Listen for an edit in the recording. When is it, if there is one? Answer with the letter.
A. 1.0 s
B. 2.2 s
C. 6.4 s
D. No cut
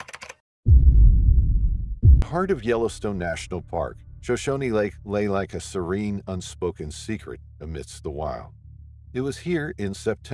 B